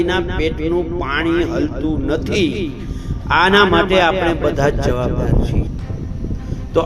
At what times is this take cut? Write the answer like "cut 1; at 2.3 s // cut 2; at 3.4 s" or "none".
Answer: cut 1; at 5.7 s